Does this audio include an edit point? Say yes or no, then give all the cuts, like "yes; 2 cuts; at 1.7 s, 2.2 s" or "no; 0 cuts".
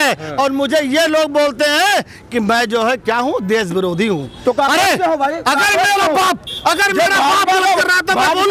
no; 0 cuts